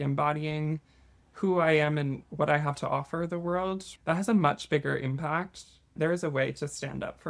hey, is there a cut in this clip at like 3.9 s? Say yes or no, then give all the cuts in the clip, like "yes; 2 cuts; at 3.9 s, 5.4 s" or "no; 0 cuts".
yes; 2 cuts; at 3.9 s, 5.9 s